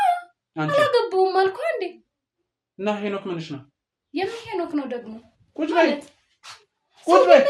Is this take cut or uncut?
uncut